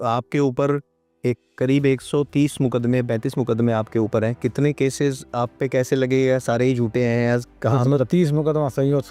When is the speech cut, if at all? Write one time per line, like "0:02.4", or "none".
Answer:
none

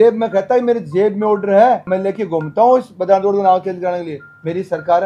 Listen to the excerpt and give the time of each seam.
none

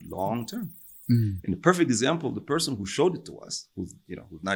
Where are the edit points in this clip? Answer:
none

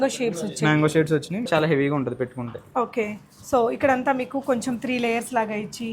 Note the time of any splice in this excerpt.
0:01.5

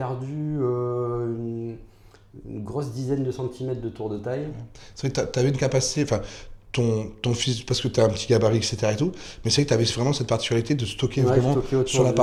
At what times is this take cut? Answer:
none

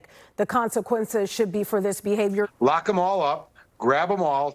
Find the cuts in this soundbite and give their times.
0:02.5

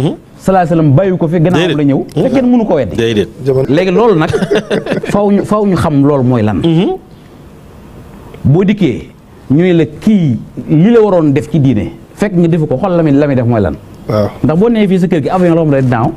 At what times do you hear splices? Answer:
0:03.6

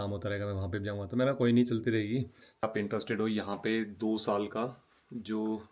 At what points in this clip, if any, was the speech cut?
0:02.6

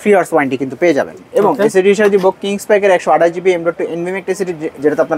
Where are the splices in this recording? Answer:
0:01.2

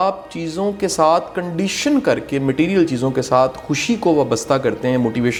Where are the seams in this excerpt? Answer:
none

